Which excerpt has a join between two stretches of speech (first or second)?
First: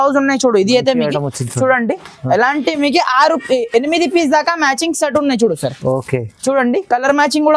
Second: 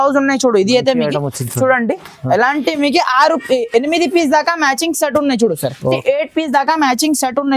second